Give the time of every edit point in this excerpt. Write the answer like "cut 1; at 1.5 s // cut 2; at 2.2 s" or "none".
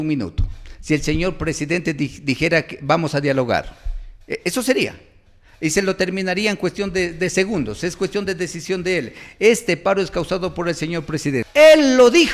cut 1; at 11.4 s